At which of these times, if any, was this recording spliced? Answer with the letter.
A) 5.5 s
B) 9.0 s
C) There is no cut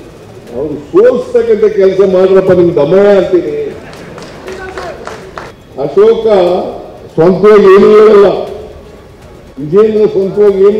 A